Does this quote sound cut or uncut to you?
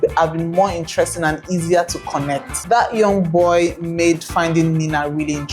cut